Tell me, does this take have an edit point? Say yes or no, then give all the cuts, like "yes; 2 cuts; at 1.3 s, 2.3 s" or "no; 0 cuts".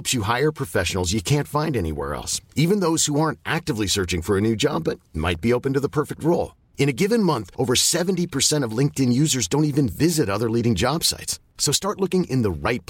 no; 0 cuts